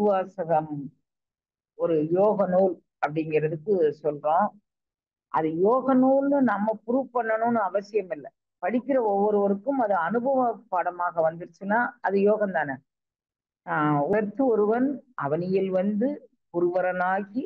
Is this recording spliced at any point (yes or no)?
yes